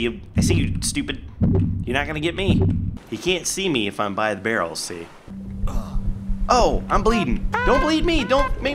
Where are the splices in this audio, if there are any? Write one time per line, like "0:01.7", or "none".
0:03.0
0:05.3

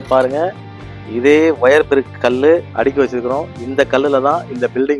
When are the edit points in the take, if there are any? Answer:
none

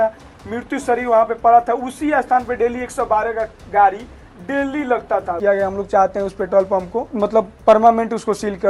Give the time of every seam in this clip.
0:05.3
0:07.1

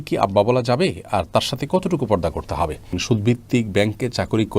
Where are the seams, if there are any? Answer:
0:03.0

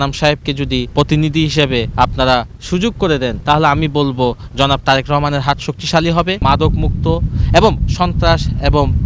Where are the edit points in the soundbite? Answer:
0:00.9
0:01.9
0:03.4
0:06.4

